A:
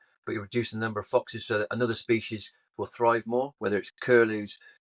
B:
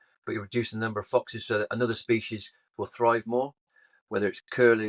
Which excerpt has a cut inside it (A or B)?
A